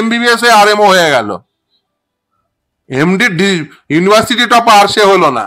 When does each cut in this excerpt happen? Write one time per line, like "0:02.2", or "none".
none

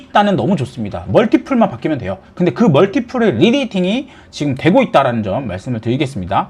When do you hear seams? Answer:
none

